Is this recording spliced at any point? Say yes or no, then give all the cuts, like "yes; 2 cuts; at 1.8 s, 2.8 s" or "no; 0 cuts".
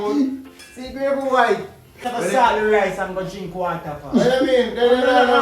yes; 1 cut; at 2.1 s